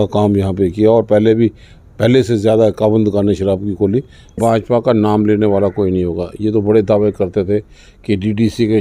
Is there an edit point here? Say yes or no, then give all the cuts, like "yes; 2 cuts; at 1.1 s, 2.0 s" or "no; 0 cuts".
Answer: yes; 1 cut; at 4.4 s